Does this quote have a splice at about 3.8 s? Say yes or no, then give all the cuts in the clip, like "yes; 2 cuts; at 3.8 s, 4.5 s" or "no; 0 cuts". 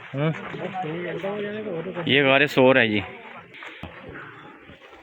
yes; 1 cut; at 3.8 s